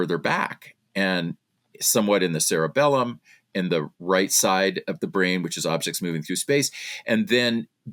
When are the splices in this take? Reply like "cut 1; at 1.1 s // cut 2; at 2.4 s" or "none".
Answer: none